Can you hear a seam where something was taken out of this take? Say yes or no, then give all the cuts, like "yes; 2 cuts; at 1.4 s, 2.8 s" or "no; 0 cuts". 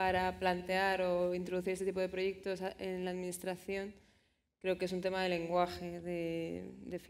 no; 0 cuts